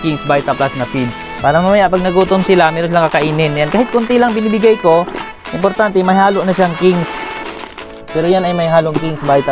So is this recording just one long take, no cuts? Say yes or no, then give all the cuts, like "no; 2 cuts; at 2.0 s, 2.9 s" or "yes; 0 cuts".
no; 2 cuts; at 1.2 s, 8.0 s